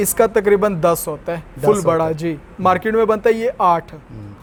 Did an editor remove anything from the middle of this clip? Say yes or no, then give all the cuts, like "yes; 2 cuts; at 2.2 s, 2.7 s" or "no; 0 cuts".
no; 0 cuts